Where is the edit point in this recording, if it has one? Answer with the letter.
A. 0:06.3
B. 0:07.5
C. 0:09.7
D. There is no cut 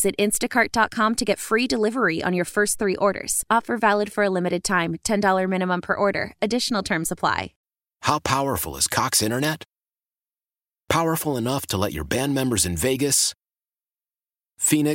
B